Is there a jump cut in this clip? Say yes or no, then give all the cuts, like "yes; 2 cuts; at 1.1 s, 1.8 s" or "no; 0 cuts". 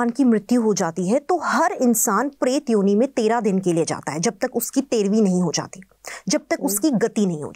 no; 0 cuts